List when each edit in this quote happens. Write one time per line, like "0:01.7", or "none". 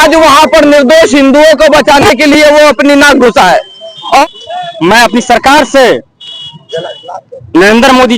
0:04.2